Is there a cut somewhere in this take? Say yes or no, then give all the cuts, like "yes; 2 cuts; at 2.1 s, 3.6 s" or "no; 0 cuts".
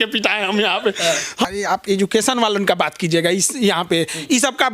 yes; 1 cut; at 1.5 s